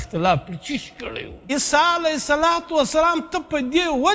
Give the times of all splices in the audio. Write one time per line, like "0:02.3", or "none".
0:01.5

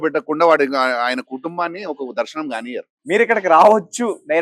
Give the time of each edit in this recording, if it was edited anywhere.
0:02.9

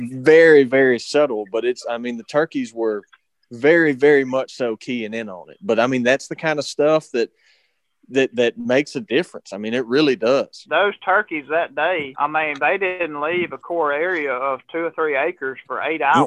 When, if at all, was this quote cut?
0:10.6
0:12.1
0:13.0

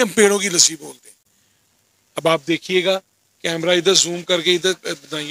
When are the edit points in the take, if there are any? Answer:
none

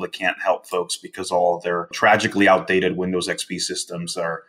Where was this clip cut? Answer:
0:01.9

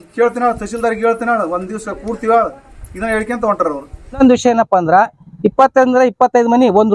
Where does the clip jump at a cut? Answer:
0:04.2

